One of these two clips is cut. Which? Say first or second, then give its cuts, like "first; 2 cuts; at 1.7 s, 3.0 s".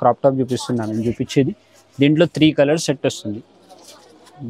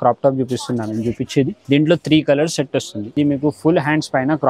second; 2 cuts; at 1.6 s, 3.0 s